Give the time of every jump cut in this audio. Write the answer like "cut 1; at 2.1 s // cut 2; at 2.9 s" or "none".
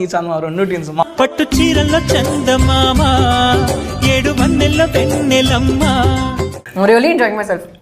cut 1; at 1.0 s // cut 2; at 6.6 s